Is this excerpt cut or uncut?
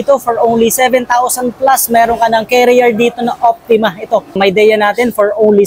cut